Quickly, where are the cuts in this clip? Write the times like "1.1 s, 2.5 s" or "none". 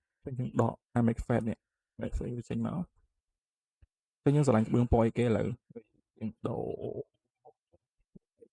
none